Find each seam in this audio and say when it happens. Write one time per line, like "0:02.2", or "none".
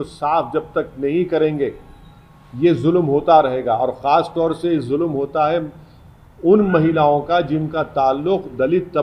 none